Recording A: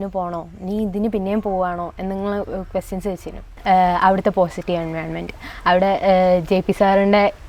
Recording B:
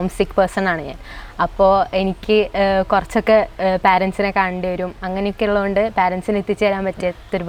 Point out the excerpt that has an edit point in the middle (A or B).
A